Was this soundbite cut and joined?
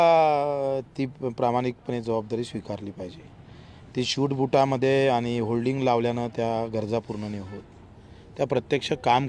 no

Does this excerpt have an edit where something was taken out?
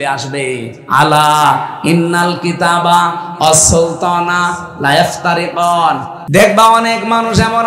yes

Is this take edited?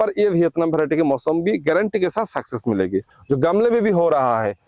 yes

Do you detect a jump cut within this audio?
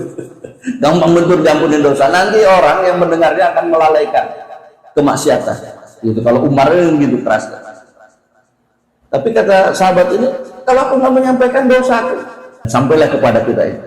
yes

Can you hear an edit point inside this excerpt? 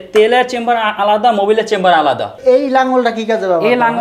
yes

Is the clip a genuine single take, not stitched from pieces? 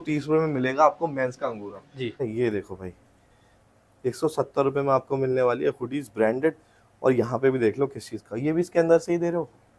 no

